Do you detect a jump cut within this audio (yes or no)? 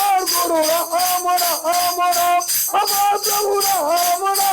no